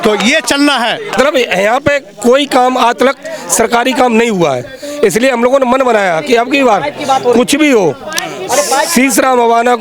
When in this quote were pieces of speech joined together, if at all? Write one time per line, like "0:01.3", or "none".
0:01.2